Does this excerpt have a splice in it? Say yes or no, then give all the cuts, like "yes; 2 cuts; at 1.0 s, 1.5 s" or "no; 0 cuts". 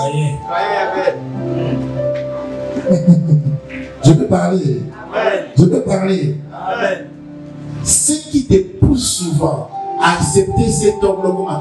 no; 0 cuts